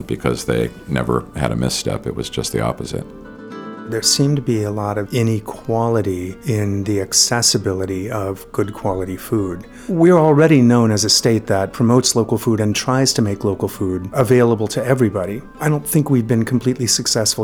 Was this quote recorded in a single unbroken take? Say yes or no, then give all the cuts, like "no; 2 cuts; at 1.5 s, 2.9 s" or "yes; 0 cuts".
no; 7 cuts; at 3.5 s, 5.0 s, 6.3 s, 9.8 s, 11.7 s, 14.1 s, 15.6 s